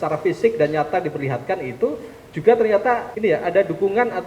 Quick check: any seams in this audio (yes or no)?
yes